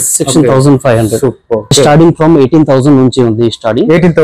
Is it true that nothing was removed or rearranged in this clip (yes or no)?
no